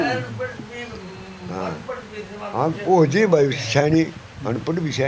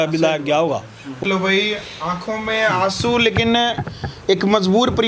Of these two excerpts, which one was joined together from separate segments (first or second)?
second